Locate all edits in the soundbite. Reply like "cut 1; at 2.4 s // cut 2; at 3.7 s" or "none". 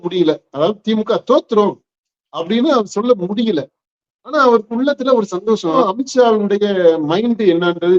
cut 1; at 5.8 s